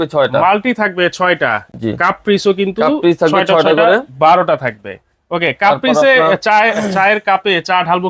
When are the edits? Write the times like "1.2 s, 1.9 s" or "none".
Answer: none